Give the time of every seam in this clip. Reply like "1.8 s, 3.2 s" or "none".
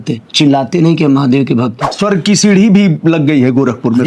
1.9 s